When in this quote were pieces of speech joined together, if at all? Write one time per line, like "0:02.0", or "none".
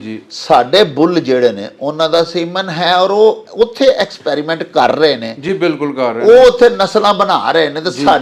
none